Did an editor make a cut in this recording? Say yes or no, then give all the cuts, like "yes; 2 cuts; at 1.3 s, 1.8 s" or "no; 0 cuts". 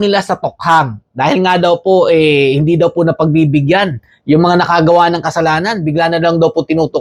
no; 0 cuts